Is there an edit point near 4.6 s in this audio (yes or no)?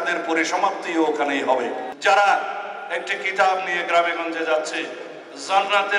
no